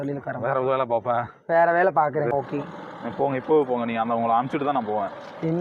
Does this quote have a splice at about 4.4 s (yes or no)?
no